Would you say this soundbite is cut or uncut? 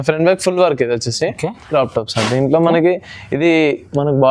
cut